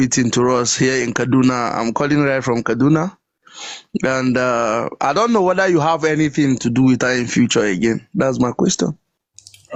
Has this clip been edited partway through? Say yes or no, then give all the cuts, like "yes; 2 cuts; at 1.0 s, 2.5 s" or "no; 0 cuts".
no; 0 cuts